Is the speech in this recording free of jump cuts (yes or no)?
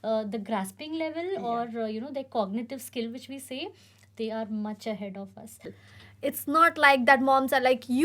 no